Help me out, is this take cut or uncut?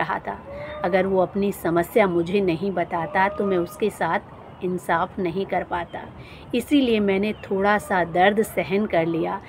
uncut